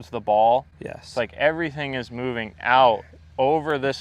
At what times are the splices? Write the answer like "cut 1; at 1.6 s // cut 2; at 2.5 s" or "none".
none